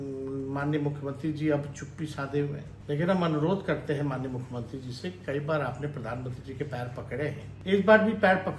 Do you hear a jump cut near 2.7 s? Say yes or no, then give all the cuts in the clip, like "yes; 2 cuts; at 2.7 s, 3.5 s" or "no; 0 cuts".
yes; 2 cuts; at 2.7 s, 7.5 s